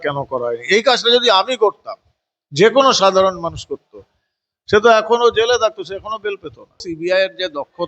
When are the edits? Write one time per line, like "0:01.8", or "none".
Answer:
0:06.9